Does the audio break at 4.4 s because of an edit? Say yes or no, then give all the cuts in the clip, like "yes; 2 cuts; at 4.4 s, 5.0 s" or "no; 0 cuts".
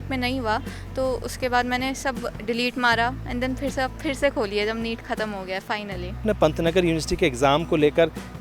no; 1 cut; at 6.2 s